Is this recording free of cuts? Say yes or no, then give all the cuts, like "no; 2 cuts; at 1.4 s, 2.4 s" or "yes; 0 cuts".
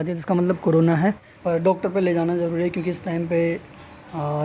no; 1 cut; at 1.3 s